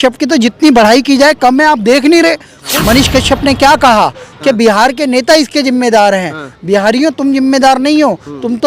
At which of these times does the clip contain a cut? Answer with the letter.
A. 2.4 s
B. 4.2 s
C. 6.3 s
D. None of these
A